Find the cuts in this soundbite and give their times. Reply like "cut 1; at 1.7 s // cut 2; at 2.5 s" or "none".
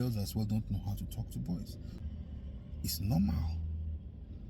cut 1; at 2.0 s